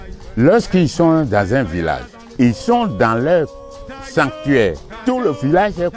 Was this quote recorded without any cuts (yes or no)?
no